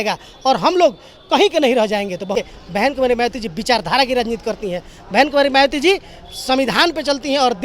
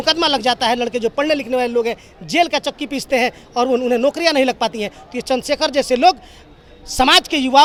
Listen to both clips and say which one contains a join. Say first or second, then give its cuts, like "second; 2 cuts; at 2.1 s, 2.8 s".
first; 1 cut; at 2.3 s